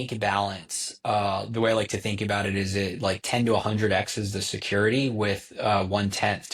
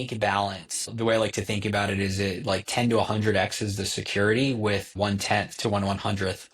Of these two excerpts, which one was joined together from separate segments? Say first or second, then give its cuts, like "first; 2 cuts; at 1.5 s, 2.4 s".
second; 2 cuts; at 0.9 s, 5.0 s